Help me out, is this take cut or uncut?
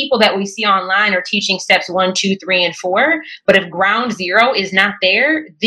uncut